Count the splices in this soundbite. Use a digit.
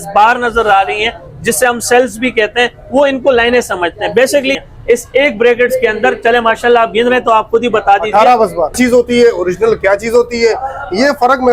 2